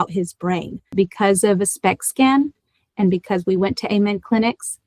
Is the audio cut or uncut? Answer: cut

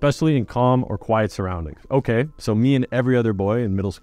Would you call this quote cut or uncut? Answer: uncut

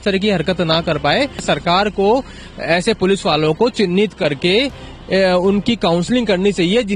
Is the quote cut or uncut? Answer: cut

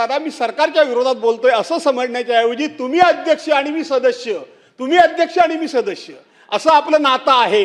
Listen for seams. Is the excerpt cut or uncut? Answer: uncut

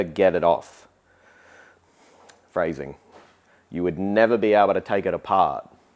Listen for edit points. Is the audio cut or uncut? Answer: uncut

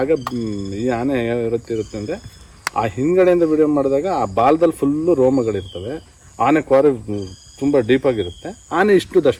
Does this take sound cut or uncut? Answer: uncut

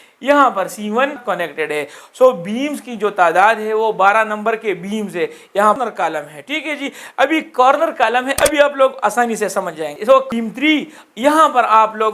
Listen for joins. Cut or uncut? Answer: cut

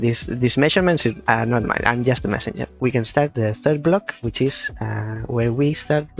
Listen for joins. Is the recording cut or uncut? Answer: cut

